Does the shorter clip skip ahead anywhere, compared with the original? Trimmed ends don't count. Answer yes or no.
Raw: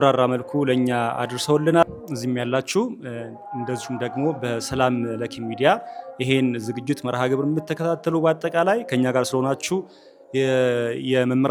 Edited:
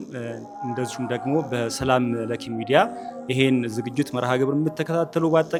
no